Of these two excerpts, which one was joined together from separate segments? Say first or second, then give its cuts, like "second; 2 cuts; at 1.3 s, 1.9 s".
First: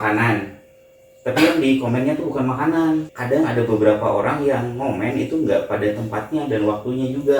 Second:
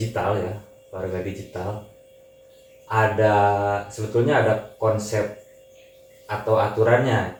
first; 1 cut; at 3.1 s